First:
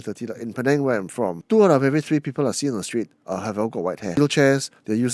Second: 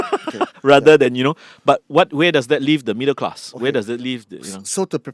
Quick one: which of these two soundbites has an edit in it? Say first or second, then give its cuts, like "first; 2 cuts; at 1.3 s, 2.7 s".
first; 2 cuts; at 1.4 s, 4.2 s